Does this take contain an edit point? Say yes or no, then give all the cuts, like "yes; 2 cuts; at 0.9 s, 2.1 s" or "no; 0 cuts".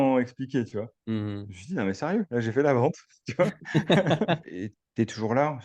yes; 1 cut; at 4.4 s